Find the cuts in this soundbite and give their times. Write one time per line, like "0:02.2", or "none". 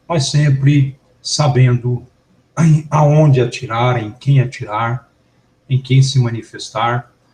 none

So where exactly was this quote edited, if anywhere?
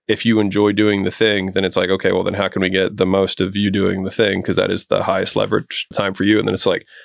0:05.9

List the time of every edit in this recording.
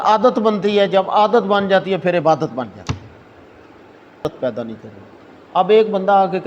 0:04.2

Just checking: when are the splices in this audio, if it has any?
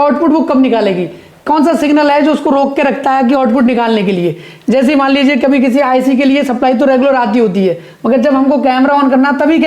none

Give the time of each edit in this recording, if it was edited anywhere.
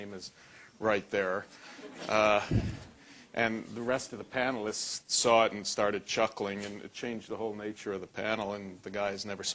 0:03.2

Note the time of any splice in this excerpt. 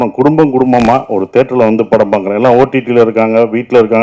none

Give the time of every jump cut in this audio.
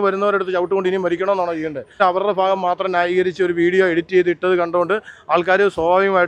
none

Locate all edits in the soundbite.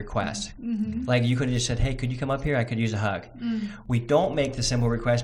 none

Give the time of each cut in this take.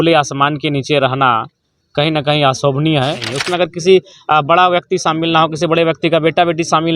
0:03.3

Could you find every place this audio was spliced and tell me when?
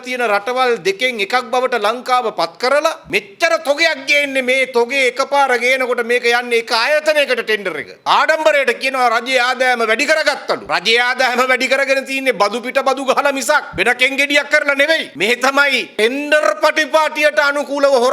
0:03.1
0:07.9
0:15.1

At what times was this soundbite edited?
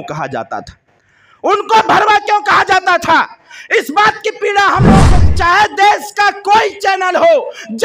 0:05.1

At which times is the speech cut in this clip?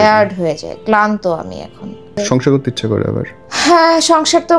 0:02.1
0:03.4

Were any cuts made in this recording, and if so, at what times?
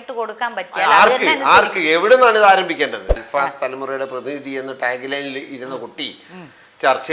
0:03.1

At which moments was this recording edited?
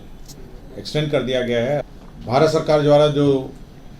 0:01.8

